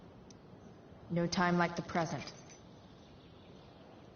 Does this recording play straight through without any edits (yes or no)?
no